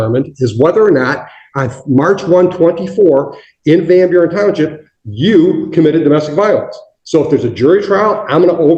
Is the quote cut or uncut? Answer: uncut